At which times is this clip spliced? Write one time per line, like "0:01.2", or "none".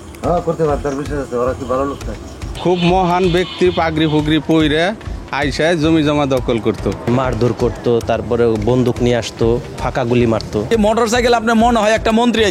0:02.5
0:07.0
0:10.7